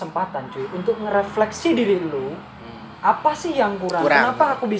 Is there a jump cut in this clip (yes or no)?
no